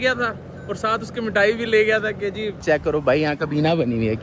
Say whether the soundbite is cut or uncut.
cut